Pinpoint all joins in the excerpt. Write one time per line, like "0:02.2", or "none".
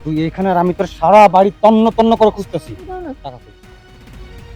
0:03.2